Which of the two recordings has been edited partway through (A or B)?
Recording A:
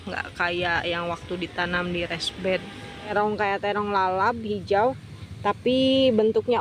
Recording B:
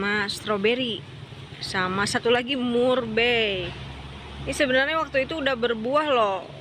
A